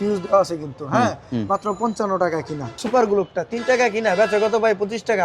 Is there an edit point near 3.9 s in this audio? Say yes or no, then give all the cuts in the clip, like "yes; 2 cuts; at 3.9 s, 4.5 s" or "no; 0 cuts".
no; 1 cut; at 2.7 s